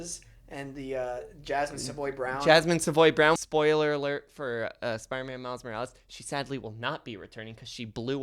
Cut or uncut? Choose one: cut